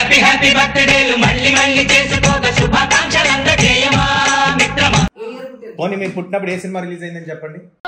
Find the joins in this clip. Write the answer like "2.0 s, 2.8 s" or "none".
5.2 s